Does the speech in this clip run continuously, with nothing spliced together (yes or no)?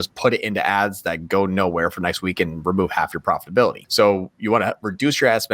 no